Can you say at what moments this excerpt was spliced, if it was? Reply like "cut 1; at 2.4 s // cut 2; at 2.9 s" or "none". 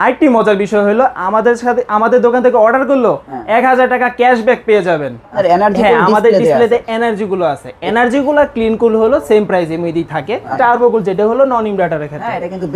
cut 1; at 5.3 s // cut 2; at 10.5 s